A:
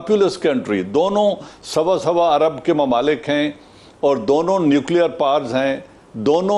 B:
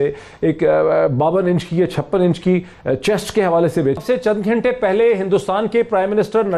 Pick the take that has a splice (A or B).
B